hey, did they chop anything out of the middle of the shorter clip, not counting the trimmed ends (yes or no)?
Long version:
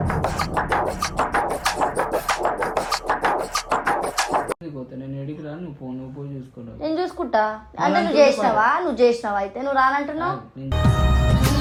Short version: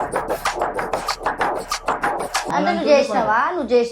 yes